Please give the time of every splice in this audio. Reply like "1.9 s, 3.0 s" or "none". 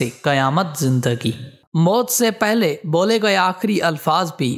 1.6 s